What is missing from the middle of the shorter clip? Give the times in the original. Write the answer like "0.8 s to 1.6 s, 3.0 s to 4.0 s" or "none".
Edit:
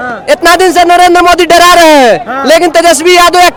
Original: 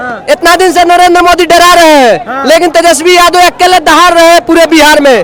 none